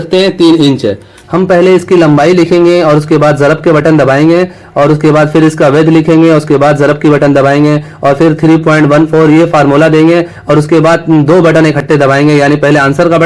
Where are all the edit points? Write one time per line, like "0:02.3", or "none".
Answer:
0:01.2